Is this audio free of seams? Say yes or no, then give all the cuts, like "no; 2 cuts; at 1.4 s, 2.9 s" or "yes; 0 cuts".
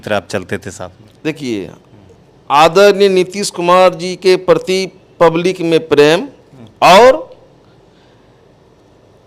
yes; 0 cuts